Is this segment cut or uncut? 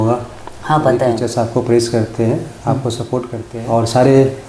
cut